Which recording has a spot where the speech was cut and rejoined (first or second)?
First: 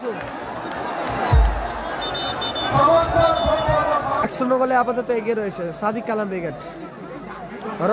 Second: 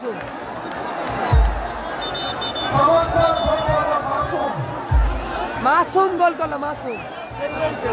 first